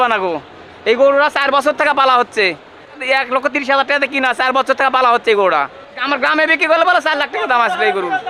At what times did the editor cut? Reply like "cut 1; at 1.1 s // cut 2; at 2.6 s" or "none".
cut 1; at 3.0 s // cut 2; at 6.0 s